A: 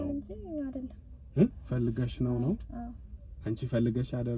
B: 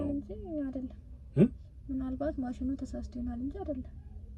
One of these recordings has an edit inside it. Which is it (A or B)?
A